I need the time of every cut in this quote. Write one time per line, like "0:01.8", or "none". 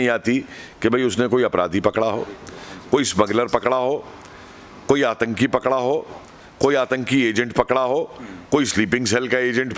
none